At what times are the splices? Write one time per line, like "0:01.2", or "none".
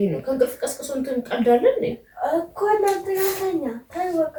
none

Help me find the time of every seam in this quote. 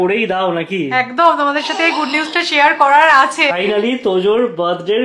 0:03.5

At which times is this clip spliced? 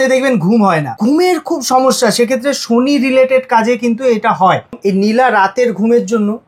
0:00.9
0:04.8

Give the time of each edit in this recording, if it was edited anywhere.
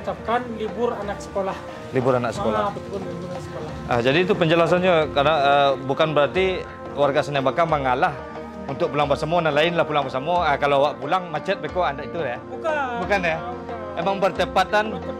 none

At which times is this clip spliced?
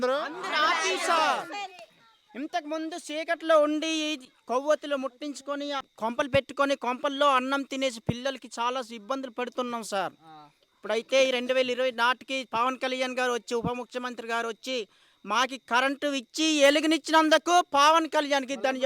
0:05.9

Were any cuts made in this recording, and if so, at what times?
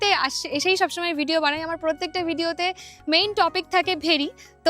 none

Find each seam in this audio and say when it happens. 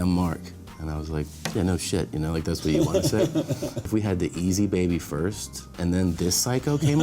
0:03.9

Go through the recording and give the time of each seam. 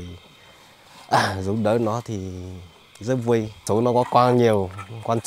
0:03.6

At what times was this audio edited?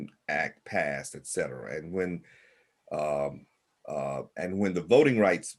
none

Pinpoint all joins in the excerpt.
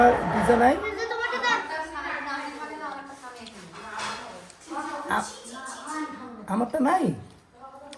none

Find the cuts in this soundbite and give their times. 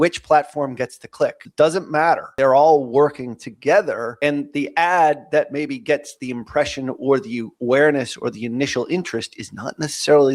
0:01.4
0:02.3
0:04.1

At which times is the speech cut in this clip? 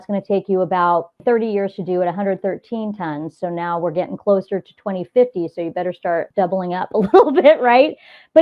0:01.2
0:06.2

